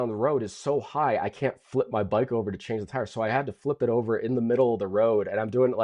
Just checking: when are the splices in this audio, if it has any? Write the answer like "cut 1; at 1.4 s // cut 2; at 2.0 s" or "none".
none